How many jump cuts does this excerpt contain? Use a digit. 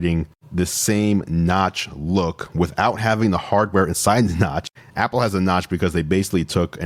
0